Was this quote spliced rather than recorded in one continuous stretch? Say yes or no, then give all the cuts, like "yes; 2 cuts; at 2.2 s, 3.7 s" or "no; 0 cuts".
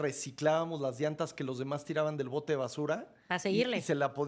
no; 0 cuts